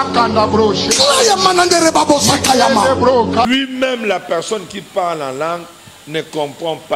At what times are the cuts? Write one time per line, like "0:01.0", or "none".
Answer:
0:03.5

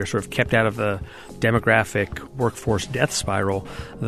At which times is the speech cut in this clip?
0:01.3

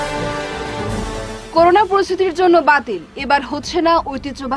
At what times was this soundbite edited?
0:01.1

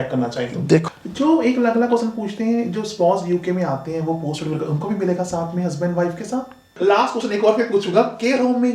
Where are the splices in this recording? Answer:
0:00.9
0:06.7

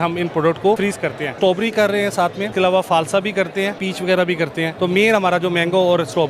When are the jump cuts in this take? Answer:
0:01.2
0:02.4
0:03.9
0:04.7

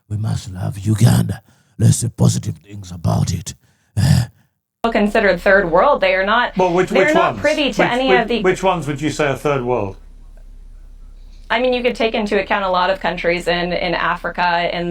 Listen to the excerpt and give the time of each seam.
0:04.8

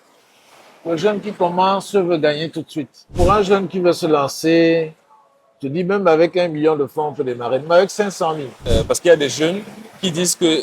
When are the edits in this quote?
0:03.1
0:08.5

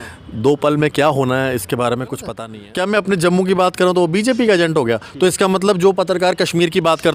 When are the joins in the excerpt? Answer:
0:02.4

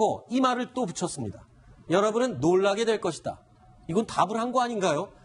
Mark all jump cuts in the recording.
0:01.9

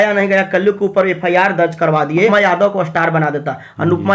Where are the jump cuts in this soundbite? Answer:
0:02.3

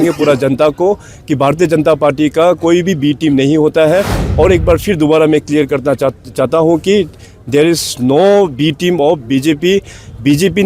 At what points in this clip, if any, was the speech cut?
0:04.2

